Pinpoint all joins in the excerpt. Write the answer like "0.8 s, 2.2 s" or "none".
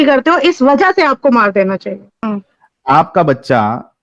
2.2 s